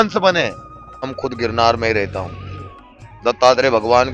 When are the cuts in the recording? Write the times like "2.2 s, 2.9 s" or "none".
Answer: 1.1 s